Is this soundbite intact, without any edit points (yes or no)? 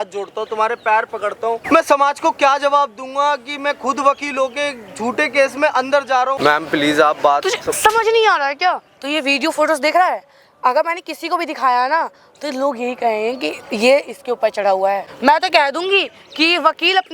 no